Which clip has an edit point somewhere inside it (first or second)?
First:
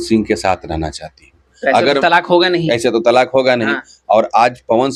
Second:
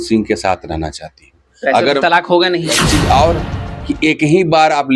second